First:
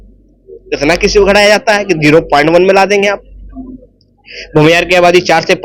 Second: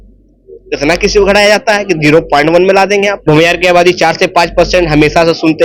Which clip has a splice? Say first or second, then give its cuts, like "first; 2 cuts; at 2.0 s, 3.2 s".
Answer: second; 1 cut; at 3.2 s